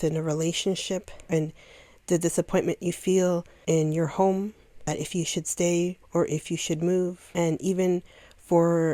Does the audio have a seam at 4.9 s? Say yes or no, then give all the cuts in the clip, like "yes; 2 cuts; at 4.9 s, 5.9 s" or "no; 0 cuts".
yes; 5 cuts; at 1.1 s, 3.5 s, 4.9 s, 6.0 s, 7.2 s